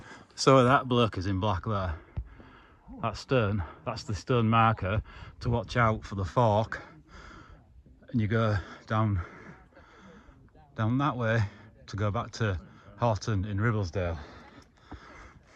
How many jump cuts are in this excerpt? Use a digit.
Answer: 0